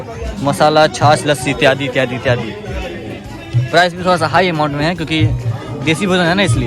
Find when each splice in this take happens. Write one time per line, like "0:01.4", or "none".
none